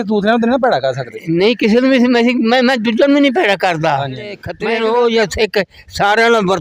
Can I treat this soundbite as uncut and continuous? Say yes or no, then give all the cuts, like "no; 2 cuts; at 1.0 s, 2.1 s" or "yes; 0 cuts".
no; 1 cut; at 4.5 s